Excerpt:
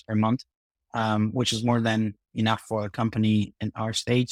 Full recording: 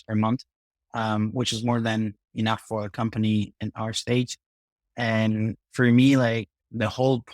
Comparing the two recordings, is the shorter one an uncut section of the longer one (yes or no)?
yes